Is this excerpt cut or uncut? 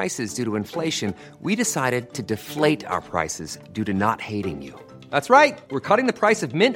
uncut